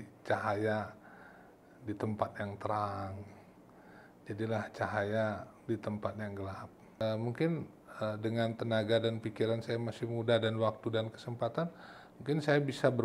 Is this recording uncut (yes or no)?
no